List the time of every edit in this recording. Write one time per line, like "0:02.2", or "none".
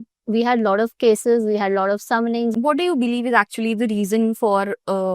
0:02.5

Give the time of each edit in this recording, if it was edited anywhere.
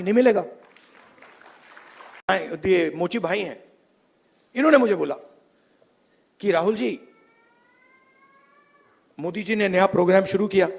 0:02.2

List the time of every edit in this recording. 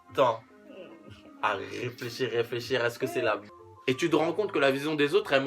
0:03.4

